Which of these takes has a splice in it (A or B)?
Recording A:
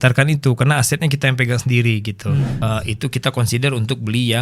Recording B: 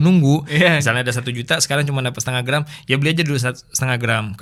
A